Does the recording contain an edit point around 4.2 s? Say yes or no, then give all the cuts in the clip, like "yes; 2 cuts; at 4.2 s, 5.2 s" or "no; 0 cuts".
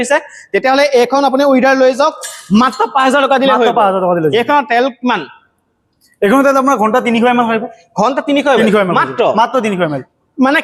no; 0 cuts